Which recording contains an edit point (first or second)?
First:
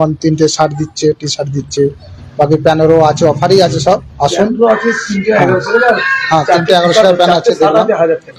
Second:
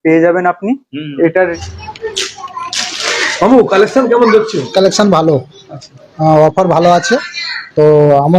second